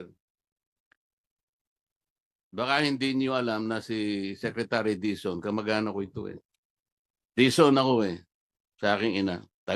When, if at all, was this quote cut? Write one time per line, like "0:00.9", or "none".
none